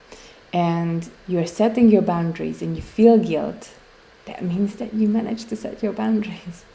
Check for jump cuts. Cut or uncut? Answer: uncut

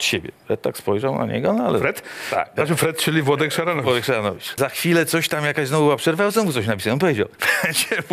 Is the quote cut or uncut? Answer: cut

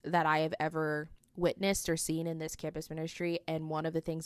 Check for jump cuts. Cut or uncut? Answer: uncut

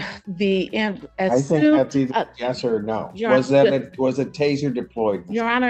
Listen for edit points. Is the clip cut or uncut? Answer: uncut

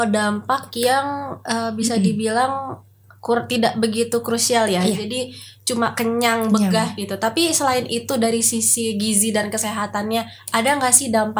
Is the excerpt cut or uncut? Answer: uncut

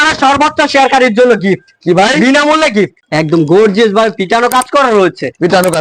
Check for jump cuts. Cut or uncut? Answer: cut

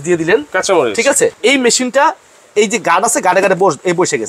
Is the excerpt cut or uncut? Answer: cut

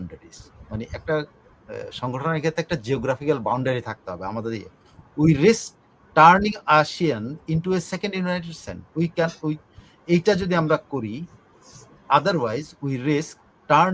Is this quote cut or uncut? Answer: uncut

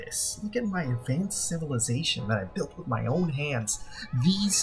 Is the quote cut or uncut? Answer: uncut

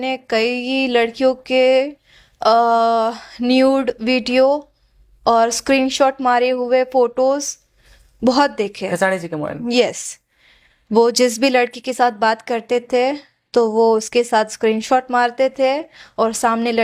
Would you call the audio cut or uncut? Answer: uncut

